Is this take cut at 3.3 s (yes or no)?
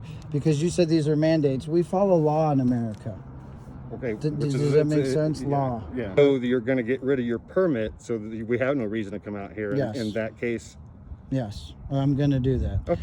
no